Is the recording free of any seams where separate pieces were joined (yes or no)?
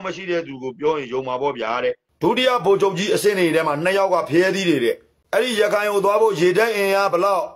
no